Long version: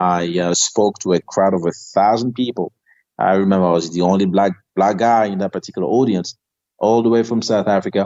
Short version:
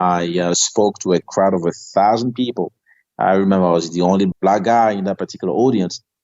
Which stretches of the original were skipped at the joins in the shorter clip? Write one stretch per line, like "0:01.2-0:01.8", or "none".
0:04.3-0:04.6